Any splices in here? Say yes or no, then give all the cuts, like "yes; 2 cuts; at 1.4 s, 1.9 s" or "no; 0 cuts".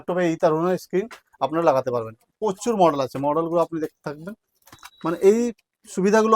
no; 0 cuts